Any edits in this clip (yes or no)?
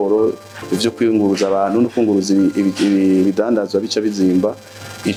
no